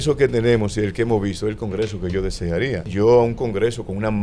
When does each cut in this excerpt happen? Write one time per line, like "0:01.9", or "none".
0:02.9